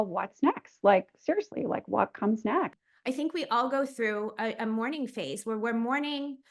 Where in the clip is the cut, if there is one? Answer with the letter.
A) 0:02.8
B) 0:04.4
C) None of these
A